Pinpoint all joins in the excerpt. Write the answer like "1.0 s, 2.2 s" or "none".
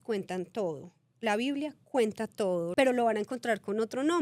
2.7 s